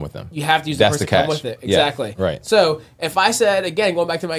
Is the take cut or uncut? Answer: uncut